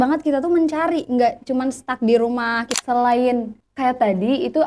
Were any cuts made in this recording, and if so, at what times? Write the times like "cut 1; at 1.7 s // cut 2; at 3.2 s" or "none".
cut 1; at 2.7 s // cut 2; at 3.6 s